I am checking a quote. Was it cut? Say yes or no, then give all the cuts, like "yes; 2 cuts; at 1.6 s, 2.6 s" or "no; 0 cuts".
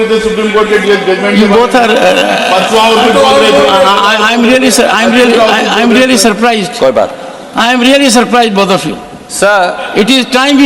no; 0 cuts